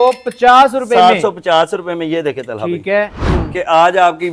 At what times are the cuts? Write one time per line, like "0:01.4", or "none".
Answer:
0:03.2